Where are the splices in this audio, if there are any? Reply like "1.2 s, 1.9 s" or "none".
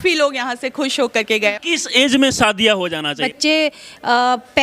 1.6 s, 3.2 s